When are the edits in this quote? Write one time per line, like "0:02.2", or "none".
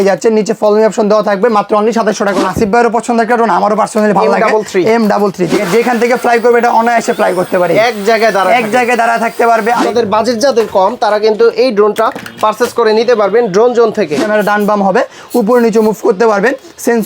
0:02.4
0:05.6
0:09.8
0:14.2